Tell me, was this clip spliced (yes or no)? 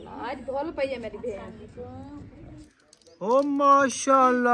yes